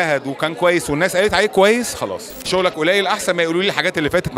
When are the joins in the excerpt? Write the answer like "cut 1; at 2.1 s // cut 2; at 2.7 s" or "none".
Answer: cut 1; at 2.5 s